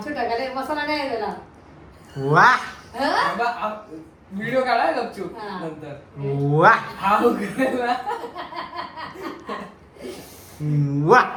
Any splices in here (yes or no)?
no